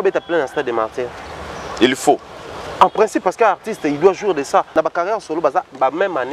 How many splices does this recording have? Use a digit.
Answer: 1